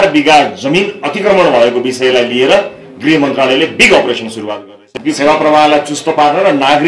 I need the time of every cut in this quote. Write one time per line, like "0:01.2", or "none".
0:04.8